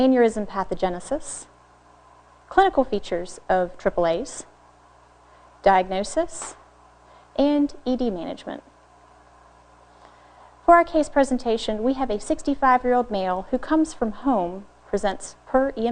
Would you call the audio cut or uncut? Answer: uncut